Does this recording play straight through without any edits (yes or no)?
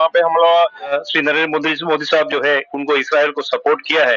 no